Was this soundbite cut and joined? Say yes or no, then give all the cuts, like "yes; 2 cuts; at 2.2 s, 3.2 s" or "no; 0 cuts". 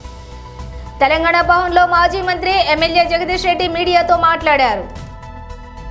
no; 0 cuts